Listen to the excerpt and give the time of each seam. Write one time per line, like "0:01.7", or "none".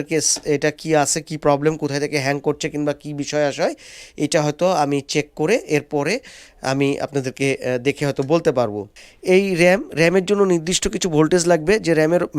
0:09.0